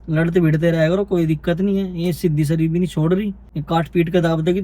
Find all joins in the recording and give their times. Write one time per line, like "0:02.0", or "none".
0:03.5

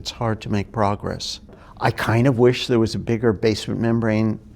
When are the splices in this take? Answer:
0:01.6

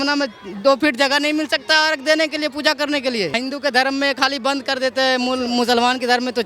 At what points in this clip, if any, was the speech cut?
0:03.4

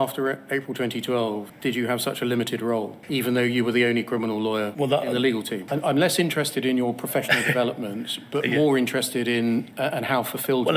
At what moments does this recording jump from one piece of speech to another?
0:04.7
0:05.6
0:09.7

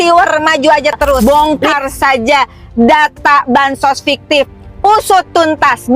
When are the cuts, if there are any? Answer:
0:01.2

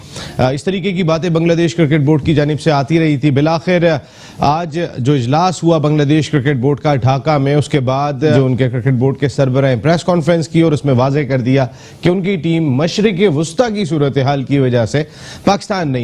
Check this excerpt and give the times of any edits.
none

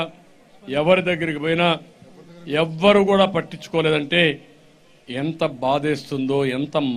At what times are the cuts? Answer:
none

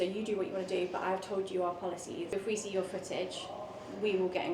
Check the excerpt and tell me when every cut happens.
0:02.3

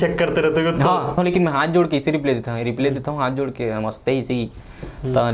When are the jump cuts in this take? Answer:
0:01.1

